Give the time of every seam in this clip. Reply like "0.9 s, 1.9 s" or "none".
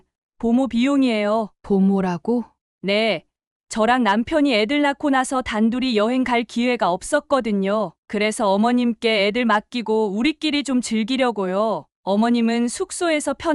none